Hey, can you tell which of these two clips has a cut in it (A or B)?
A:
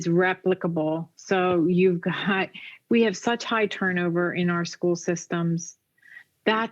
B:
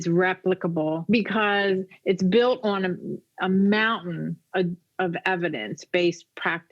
B